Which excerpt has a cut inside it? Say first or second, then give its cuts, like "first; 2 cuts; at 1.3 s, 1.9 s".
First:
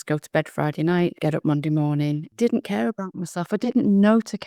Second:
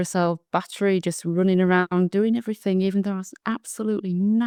first; 2 cuts; at 1.2 s, 2.3 s